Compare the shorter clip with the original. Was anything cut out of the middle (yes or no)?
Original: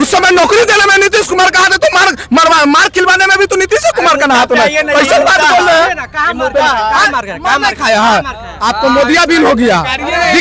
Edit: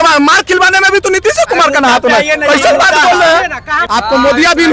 yes